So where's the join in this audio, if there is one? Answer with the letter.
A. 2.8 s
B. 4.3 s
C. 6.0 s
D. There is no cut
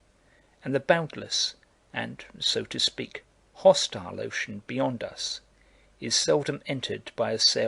A